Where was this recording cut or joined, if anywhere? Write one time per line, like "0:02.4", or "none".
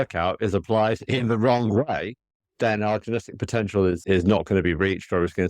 0:04.0